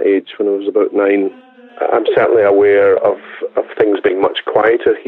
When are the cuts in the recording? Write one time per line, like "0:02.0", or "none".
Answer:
0:01.5